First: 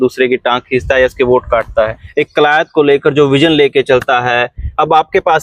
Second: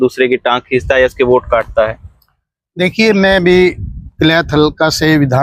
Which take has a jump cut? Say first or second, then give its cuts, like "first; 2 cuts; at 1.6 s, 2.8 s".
first; 1 cut; at 2.0 s